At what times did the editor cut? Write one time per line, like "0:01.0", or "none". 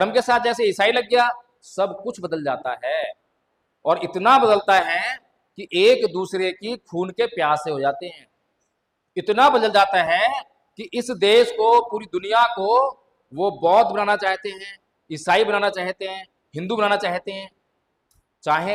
none